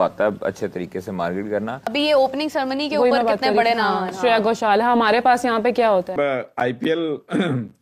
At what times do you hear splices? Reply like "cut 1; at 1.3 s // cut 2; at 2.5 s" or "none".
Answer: cut 1; at 1.8 s // cut 2; at 6.1 s